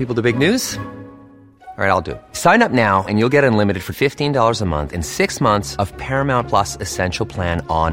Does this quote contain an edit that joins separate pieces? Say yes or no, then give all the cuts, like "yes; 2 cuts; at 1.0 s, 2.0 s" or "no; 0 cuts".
no; 0 cuts